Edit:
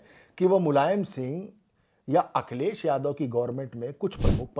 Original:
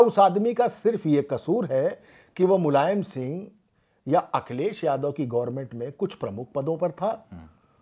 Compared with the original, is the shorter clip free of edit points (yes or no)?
yes